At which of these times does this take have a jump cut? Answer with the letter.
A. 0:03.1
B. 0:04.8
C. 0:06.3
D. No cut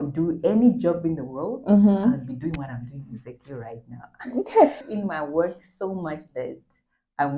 B